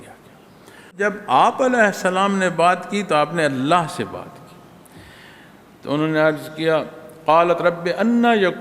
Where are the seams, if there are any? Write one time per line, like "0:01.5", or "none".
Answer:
0:01.0